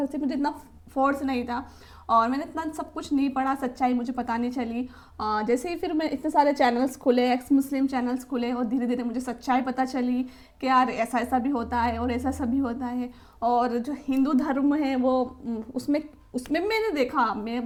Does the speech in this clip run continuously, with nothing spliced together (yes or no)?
yes